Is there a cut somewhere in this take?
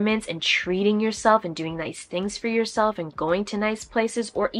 no; 0 cuts

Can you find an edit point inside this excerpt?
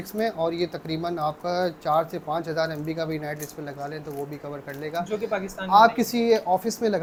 no; 0 cuts

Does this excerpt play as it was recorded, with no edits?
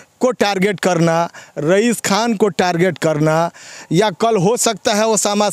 yes; 0 cuts

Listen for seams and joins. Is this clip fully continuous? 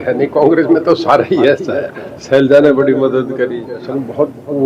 no; 1 cut; at 3.7 s

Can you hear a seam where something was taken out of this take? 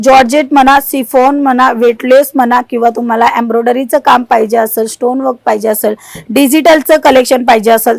no; 0 cuts

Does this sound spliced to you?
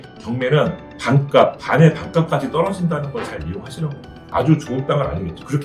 yes; 1 cut; at 4.2 s

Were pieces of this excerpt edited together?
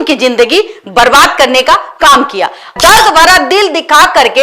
yes; 1 cut; at 2.7 s

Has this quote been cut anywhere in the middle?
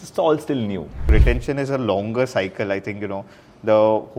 yes; 1 cut; at 1.0 s

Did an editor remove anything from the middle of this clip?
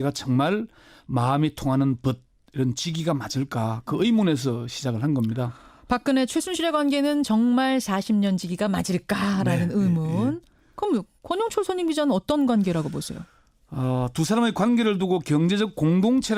no; 0 cuts

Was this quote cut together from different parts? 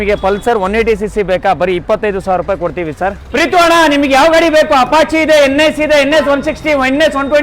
yes; 1 cut; at 3.2 s

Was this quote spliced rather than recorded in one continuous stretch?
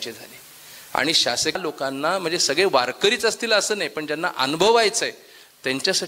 yes; 1 cut; at 1.6 s

